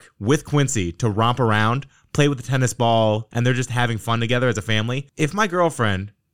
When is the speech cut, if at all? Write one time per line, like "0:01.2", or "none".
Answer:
0:03.3